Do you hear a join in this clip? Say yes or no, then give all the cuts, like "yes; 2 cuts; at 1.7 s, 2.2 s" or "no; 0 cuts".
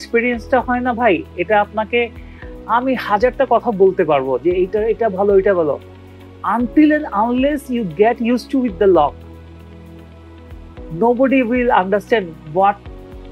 no; 0 cuts